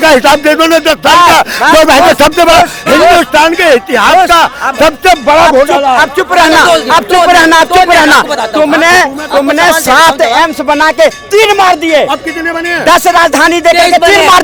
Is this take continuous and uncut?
yes; 0 cuts

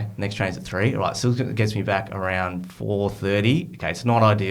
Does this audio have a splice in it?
no; 0 cuts

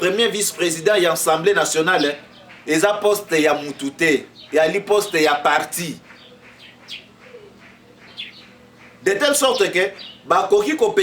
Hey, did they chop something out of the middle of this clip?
no; 0 cuts

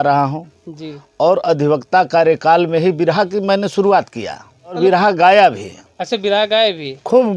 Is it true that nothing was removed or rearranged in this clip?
yes; 0 cuts

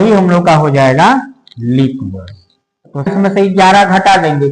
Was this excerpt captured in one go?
no; 1 cut; at 3.1 s

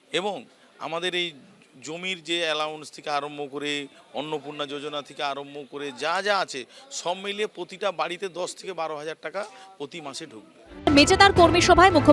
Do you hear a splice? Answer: yes; 1 cut; at 10.9 s

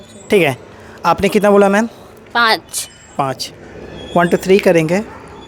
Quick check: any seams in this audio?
no; 0 cuts

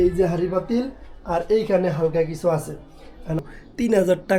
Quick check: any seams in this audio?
yes; 1 cut; at 3.4 s

